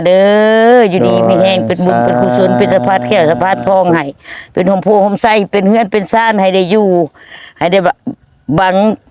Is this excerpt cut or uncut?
uncut